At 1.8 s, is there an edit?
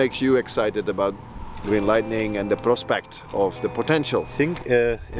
no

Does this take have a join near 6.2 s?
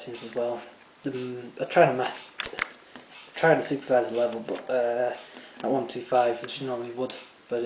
no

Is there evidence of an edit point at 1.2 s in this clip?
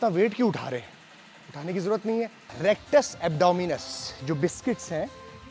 no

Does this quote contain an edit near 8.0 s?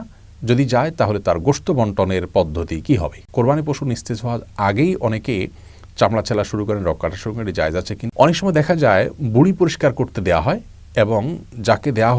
yes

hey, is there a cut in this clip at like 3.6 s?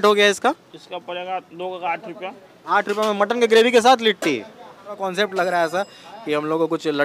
no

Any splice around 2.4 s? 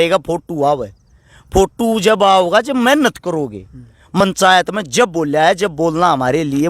no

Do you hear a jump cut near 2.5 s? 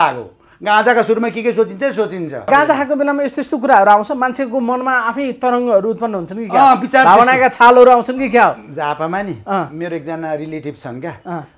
yes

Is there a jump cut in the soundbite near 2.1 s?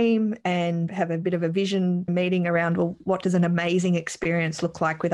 yes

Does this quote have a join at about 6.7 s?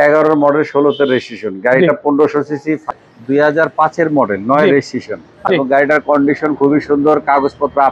no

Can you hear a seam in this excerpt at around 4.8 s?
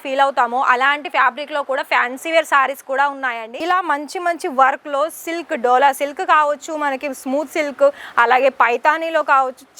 no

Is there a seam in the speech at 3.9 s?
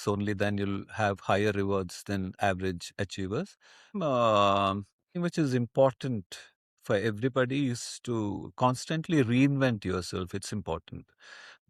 yes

